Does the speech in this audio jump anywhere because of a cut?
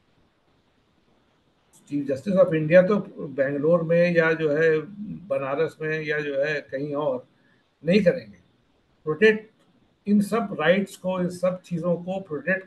no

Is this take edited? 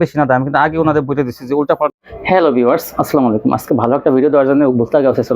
yes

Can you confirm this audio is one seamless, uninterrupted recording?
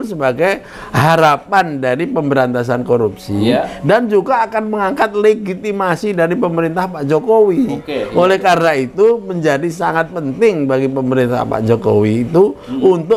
yes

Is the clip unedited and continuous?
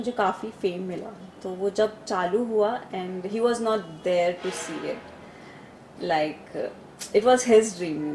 yes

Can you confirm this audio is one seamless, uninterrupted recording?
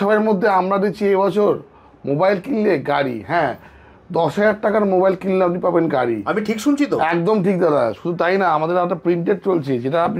yes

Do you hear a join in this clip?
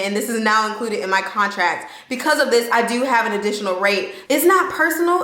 yes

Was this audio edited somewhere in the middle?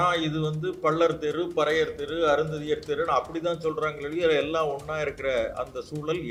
no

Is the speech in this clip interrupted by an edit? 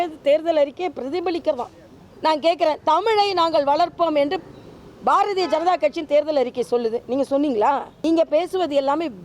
yes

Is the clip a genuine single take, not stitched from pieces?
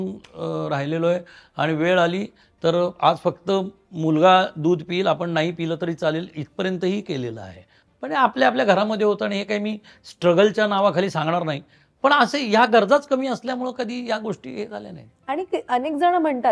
yes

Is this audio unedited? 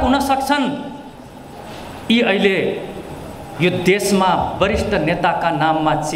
yes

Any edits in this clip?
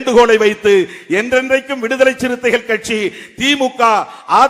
no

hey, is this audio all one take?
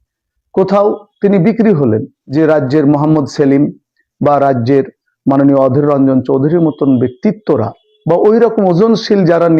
no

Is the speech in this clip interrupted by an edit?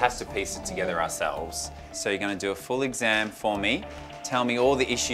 no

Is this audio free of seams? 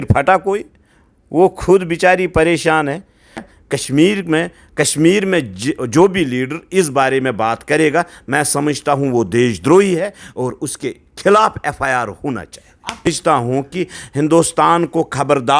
no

